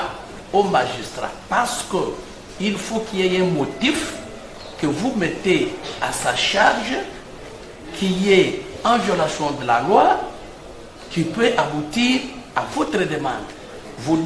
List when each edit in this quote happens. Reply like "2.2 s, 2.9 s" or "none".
none